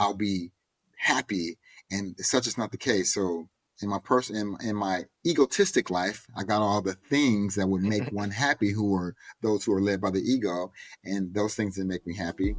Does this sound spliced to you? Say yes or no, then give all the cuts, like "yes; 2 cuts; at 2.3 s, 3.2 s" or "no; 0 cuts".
no; 0 cuts